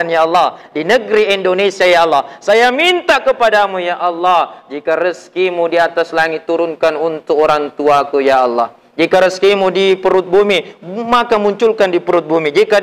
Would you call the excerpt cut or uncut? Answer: uncut